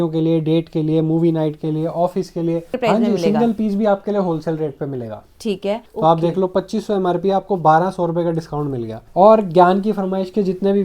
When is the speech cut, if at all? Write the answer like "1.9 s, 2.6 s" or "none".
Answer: 2.7 s, 5.9 s, 9.0 s